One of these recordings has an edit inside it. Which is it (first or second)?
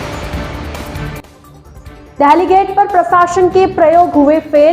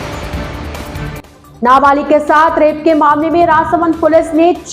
first